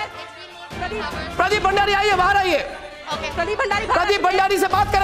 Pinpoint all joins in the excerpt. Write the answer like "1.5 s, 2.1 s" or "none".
none